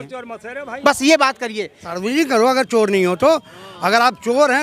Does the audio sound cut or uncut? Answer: cut